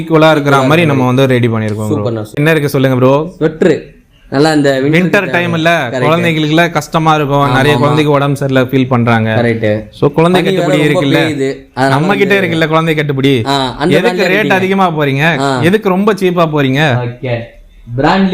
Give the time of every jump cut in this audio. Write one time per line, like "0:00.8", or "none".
0:02.3